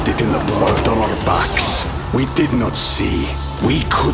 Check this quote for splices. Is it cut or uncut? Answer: uncut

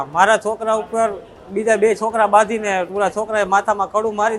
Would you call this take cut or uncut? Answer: uncut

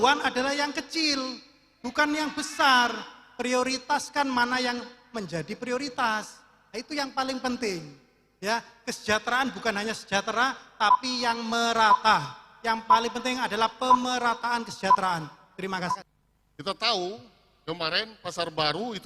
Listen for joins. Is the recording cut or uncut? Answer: cut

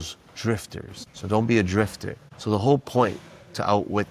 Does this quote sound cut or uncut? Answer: cut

